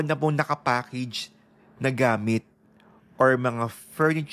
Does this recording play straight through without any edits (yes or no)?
yes